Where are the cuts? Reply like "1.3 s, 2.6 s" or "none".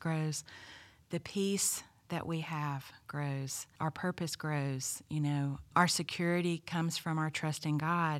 3.6 s, 5.7 s